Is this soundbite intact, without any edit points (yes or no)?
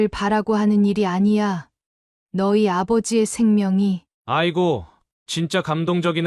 yes